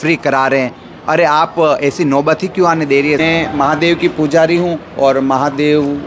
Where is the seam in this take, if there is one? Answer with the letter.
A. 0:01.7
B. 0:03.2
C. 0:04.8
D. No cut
B